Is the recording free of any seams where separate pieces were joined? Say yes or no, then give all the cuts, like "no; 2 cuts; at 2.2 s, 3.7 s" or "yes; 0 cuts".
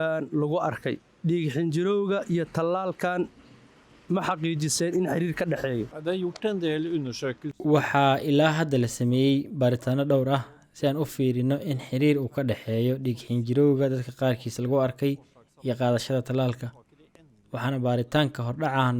no; 2 cuts; at 5.9 s, 7.6 s